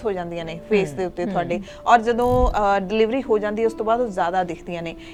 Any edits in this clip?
no; 0 cuts

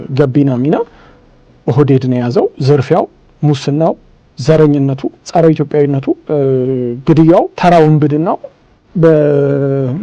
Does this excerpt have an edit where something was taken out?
yes; 4 cuts; at 2.6 s, 5.1 s, 6.2 s, 7.5 s

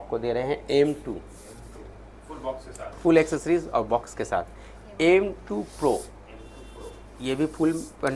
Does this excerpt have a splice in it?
no; 0 cuts

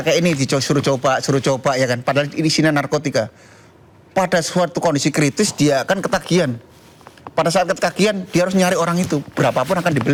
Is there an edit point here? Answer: no; 0 cuts

